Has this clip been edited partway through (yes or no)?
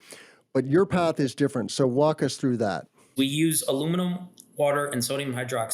yes